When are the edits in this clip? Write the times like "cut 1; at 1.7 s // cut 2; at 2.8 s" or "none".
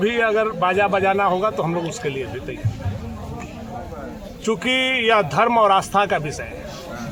none